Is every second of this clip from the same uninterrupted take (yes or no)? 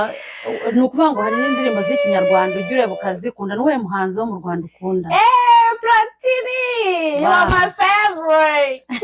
yes